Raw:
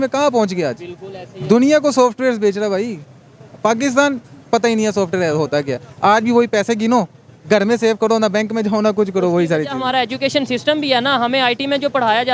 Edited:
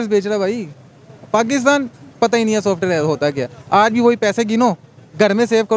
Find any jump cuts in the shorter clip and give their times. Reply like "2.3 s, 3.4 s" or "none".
none

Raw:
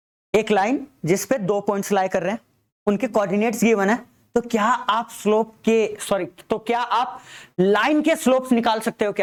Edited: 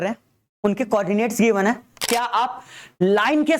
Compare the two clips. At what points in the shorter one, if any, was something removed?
2.0 s

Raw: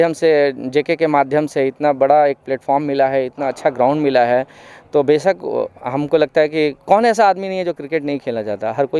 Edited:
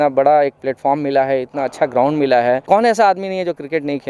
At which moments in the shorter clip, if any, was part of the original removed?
2.6 s

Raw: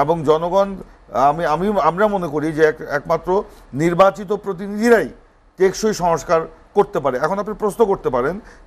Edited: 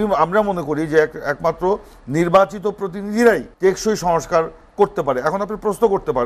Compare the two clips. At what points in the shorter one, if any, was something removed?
3.5 s

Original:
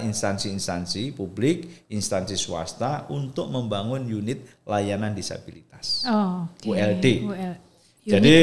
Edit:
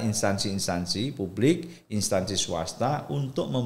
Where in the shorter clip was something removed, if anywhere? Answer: none

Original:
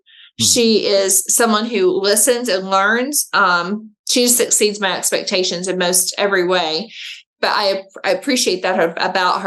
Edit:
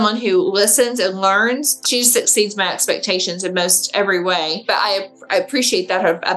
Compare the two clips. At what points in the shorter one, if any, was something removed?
1.7 s, 4.6 s

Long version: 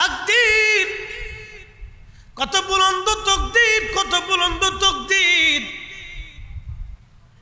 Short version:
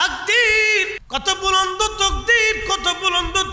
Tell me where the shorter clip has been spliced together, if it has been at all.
1.0 s

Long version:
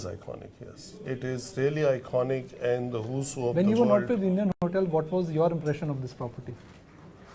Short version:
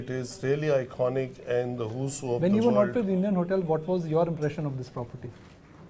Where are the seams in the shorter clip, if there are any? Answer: 3.4 s

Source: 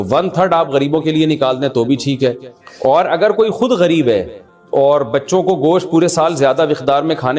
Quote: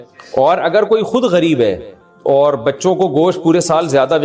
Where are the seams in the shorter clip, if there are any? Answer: none

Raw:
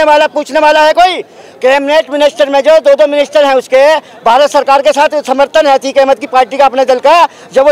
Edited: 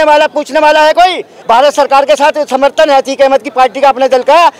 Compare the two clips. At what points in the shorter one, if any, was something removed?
1.3 s

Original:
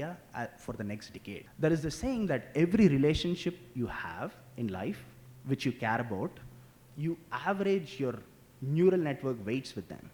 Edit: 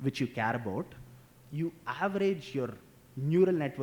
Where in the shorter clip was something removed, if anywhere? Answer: none

